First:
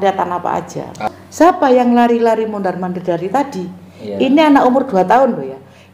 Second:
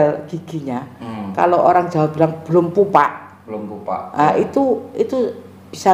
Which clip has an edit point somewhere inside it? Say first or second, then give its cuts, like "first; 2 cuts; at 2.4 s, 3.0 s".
first; 1 cut; at 1.0 s